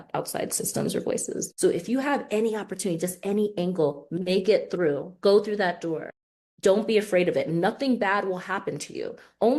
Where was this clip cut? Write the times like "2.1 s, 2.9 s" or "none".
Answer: 1.5 s